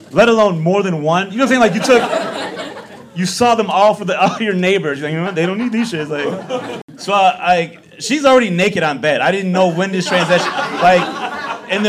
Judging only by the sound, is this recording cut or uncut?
cut